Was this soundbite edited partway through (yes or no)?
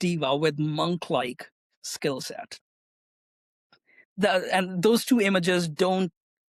no